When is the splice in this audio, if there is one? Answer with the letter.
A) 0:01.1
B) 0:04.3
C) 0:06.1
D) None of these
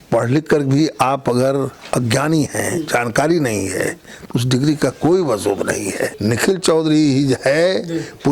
C